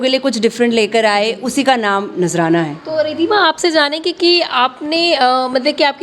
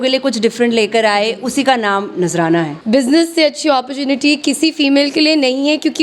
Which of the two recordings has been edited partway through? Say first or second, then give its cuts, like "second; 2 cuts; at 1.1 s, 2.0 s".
second; 1 cut; at 2.8 s